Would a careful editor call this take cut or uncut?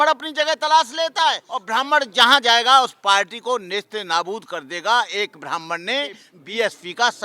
cut